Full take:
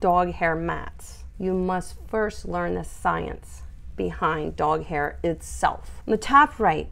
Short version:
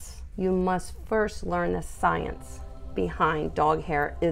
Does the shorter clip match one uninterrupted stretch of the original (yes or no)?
yes